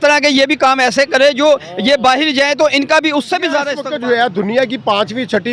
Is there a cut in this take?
yes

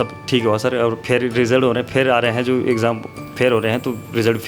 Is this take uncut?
yes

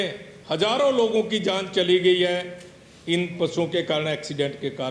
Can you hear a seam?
no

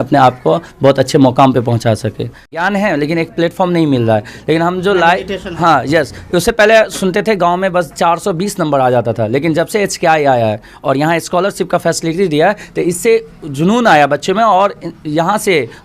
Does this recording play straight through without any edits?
no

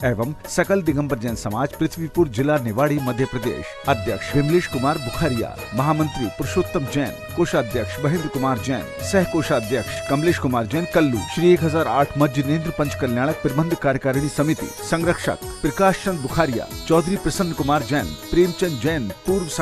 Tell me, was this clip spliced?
no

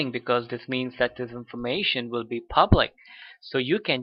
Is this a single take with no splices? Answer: yes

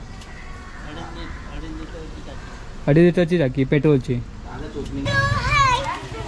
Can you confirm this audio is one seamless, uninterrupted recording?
no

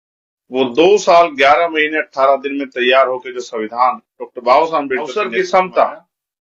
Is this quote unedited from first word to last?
no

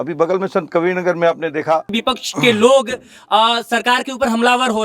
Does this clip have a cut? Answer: yes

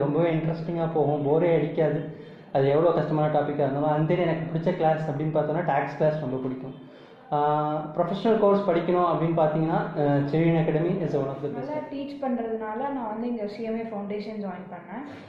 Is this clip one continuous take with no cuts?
yes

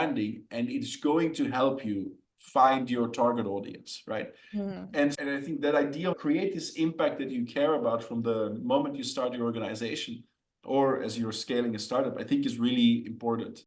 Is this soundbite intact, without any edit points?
yes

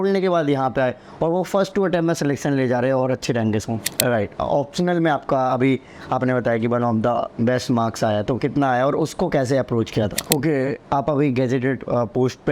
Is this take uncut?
no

